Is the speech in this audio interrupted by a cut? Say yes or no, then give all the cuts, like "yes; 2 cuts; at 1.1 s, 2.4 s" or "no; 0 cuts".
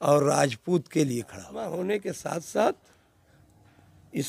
yes; 1 cut; at 1.7 s